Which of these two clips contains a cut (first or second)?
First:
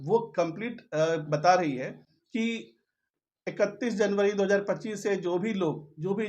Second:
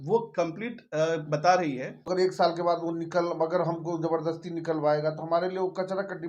second